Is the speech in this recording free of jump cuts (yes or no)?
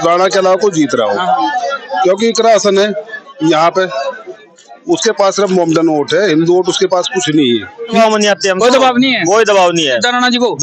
no